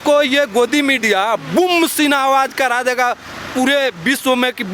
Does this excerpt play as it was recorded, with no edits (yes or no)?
yes